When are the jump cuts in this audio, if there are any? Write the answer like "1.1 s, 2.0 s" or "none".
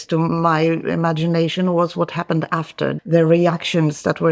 3.0 s